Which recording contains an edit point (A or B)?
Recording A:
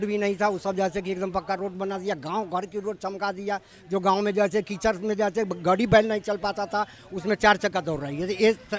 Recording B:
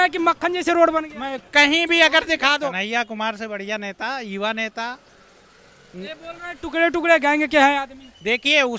B